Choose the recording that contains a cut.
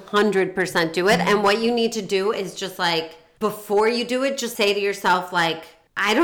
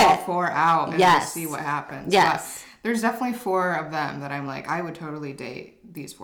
first; 1 cut; at 4.5 s

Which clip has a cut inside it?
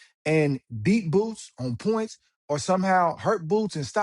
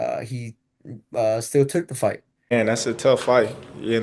second; 1 cut; at 2.8 s

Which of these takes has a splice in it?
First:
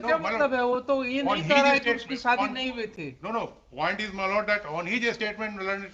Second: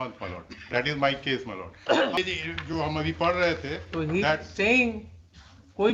second; 1 cut; at 2.2 s

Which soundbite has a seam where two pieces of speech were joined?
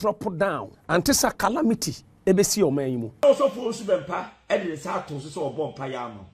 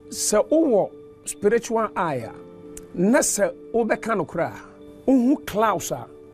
first; 1 cut; at 3.2 s

